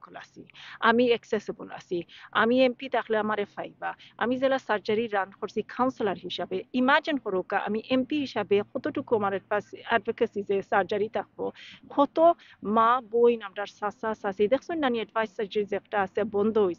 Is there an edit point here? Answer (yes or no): no